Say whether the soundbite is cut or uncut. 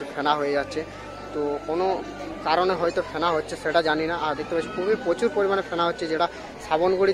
cut